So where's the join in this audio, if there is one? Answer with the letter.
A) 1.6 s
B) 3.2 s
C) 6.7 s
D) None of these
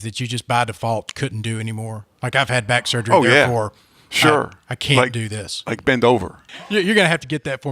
C